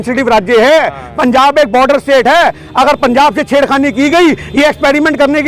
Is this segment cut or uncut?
uncut